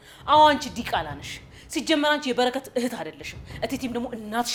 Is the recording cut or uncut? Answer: uncut